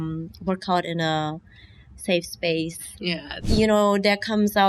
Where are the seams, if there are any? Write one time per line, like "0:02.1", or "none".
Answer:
0:03.3